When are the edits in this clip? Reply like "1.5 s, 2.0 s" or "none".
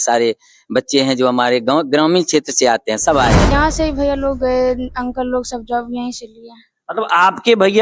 3.5 s